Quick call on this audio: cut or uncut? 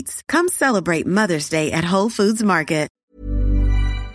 cut